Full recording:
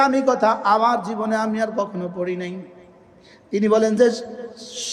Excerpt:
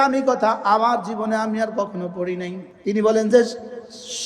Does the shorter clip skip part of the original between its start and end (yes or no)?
yes